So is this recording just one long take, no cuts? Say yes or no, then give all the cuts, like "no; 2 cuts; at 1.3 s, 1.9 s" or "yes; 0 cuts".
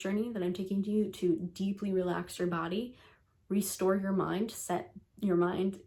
yes; 0 cuts